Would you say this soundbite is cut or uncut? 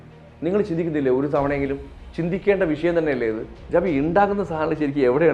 cut